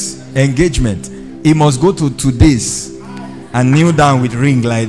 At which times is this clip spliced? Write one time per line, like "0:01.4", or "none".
none